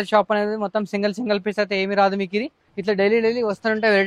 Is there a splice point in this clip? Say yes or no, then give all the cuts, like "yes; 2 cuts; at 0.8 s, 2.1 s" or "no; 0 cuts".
yes; 1 cut; at 2.6 s